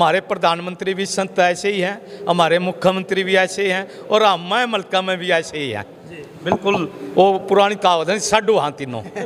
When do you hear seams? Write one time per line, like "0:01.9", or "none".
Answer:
none